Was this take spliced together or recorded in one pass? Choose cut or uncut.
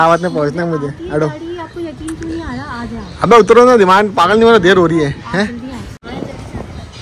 uncut